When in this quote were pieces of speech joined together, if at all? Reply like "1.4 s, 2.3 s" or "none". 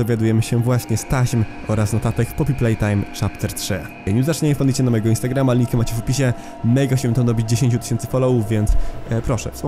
4.0 s